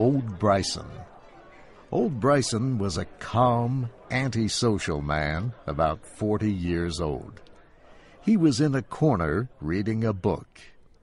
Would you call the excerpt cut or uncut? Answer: uncut